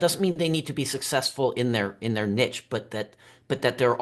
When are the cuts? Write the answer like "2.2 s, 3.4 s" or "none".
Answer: none